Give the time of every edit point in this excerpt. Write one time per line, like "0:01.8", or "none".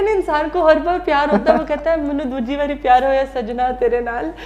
none